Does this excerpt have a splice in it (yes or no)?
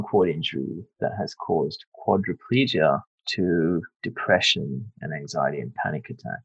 no